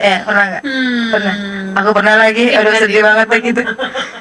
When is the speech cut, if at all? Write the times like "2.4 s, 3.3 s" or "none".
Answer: none

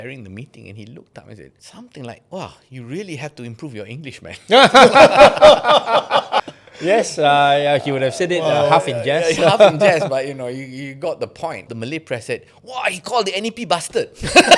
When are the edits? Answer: 1.6 s, 6.5 s, 11.7 s

